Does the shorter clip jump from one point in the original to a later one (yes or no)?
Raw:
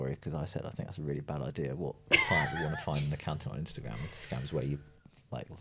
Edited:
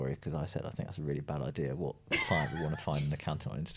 no